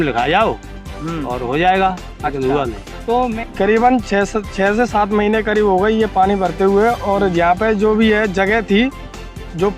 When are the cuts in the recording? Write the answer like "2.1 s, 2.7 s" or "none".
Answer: 3.4 s